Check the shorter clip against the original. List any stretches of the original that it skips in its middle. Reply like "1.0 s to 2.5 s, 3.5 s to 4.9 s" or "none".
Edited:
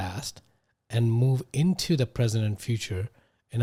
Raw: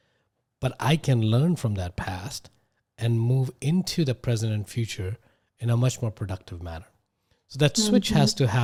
none